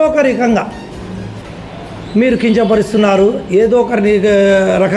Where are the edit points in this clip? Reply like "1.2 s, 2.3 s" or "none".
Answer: none